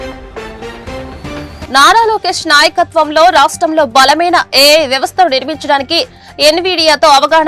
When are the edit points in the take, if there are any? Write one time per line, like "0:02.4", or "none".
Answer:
0:01.6